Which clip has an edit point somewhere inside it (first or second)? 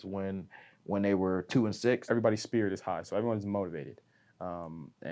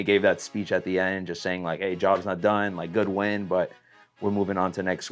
first